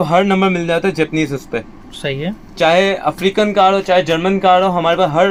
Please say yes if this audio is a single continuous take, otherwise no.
yes